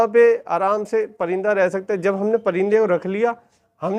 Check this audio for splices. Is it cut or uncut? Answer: uncut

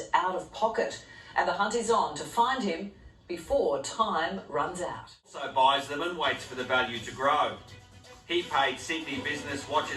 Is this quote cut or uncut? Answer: cut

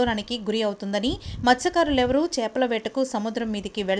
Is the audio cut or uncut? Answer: uncut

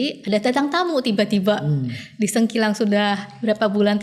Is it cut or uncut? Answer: uncut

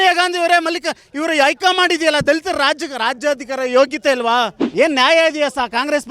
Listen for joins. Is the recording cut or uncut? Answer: cut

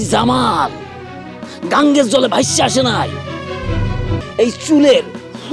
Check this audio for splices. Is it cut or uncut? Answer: cut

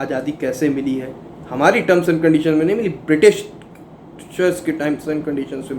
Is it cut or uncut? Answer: uncut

